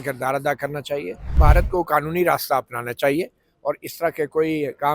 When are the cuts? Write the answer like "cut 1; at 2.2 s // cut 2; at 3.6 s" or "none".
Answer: cut 1; at 1.4 s